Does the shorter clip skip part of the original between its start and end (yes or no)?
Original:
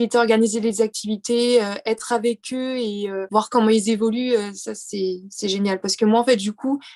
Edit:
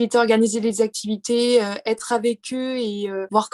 no